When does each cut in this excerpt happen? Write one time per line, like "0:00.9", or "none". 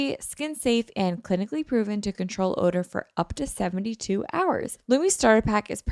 0:04.7